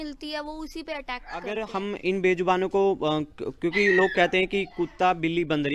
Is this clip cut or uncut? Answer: cut